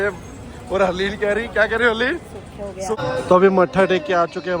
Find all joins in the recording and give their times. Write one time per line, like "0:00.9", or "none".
0:03.0